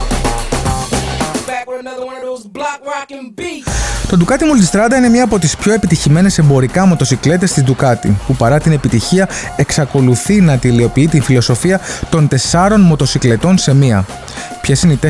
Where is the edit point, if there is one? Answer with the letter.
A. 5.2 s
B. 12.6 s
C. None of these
C